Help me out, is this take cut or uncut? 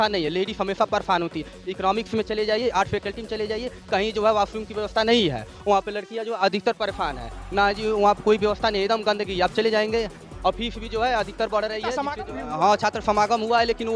cut